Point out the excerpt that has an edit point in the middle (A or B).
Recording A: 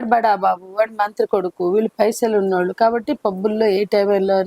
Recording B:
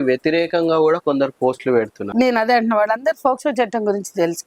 B